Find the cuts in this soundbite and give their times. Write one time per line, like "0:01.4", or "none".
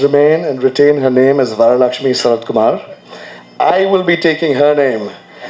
none